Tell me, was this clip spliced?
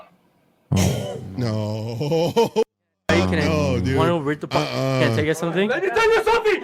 yes; 1 cut; at 5.7 s

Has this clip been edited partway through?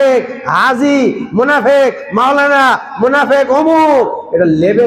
no; 0 cuts

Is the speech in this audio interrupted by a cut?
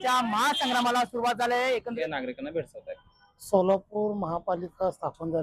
yes; 1 cut; at 1.9 s

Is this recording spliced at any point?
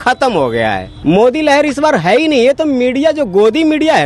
yes; 1 cut; at 0.9 s

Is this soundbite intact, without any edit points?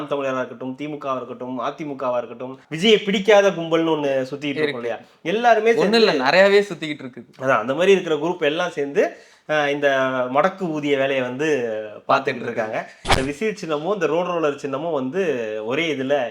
no; 2 cuts; at 2.6 s, 13.0 s

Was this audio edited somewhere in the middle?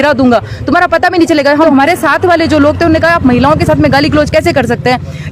yes; 1 cut; at 1.6 s

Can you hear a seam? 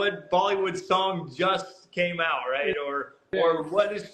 no; 0 cuts

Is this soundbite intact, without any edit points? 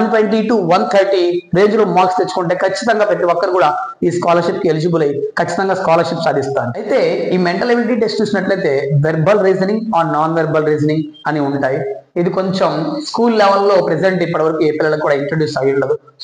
no; 1 cut; at 6.8 s

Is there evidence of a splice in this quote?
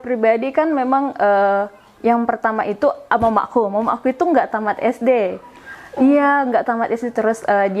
no; 0 cuts

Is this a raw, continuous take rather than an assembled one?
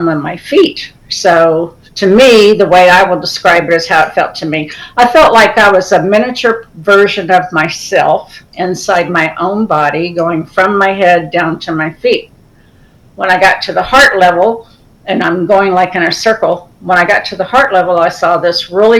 yes; 0 cuts

